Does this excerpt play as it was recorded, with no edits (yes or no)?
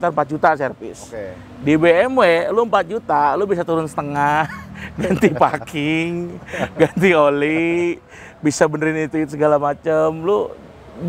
yes